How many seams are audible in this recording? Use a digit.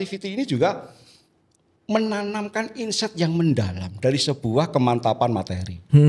0